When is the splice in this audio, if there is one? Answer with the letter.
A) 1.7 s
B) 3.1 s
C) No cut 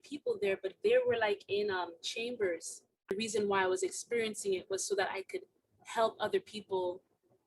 B